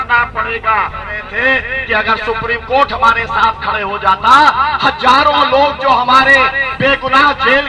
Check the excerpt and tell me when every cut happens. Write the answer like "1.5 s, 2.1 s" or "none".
1.2 s